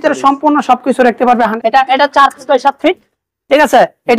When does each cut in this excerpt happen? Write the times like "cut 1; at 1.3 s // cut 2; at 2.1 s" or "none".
cut 1; at 1.5 s